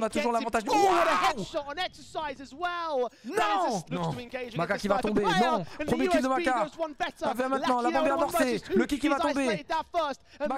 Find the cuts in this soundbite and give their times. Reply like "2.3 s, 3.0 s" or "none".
3.8 s